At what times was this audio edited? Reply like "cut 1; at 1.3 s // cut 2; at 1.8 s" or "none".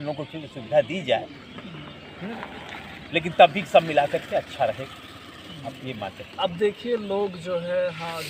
none